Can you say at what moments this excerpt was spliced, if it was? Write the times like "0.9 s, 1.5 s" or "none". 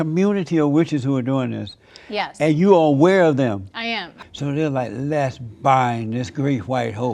4.1 s